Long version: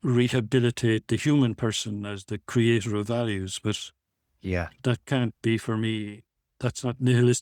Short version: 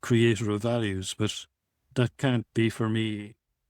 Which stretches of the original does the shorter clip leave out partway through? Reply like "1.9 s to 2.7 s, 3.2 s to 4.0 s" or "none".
4.3 s to 4.7 s

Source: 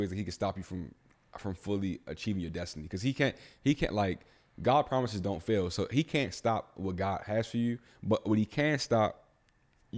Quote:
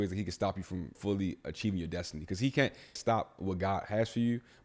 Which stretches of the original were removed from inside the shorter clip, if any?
1.0 s to 1.6 s, 3.6 s to 6.3 s

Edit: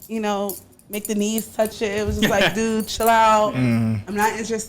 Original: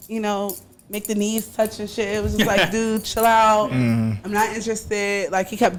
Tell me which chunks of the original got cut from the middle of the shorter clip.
1.7 s to 1.9 s

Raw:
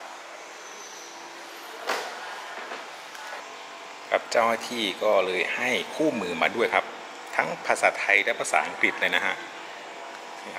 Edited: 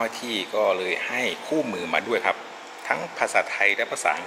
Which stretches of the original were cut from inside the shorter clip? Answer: none

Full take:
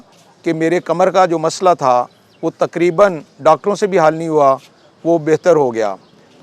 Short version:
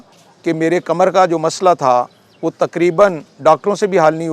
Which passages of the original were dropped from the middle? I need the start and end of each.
none

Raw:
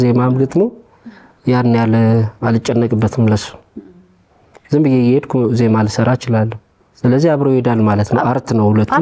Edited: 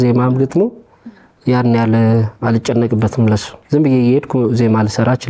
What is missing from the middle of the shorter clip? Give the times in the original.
3.5 s to 4.5 s

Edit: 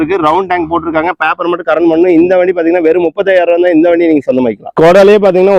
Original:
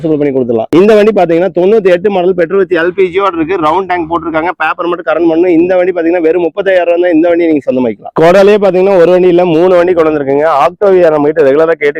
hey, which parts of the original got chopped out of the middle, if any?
none

